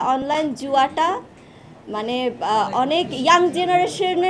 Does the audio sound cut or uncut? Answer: uncut